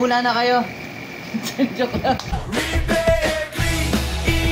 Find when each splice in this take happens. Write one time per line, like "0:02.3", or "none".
0:02.3